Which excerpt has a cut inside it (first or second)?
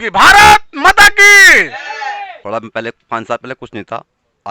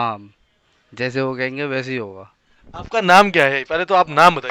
first